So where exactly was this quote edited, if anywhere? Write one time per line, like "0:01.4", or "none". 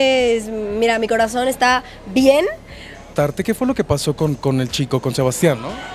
0:03.1